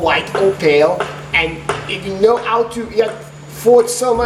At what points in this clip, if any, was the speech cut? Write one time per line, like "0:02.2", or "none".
none